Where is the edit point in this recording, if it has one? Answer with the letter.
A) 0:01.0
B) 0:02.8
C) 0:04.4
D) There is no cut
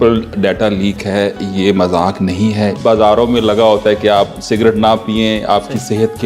B